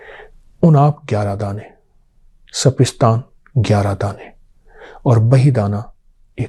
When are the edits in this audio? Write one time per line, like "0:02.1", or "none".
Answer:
none